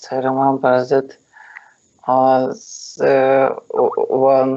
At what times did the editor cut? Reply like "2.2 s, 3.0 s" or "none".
3.4 s